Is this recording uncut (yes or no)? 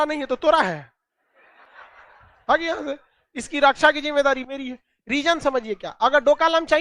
yes